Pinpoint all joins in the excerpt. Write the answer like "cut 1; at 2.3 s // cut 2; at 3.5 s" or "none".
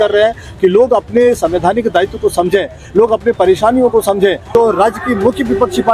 cut 1; at 4.4 s